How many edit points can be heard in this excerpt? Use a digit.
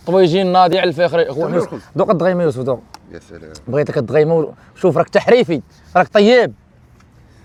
0